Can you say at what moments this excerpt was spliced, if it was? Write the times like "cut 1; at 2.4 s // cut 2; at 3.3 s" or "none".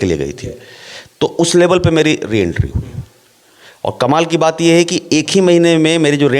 none